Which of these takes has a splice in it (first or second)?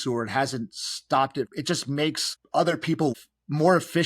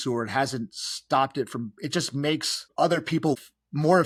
first